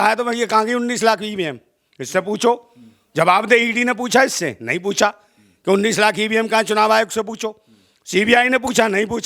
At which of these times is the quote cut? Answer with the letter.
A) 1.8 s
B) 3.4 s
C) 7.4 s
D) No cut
D